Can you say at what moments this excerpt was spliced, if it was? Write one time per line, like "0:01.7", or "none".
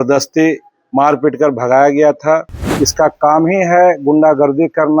0:02.6